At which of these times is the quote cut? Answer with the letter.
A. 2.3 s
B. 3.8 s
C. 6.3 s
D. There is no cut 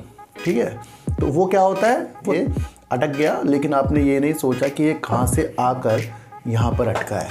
A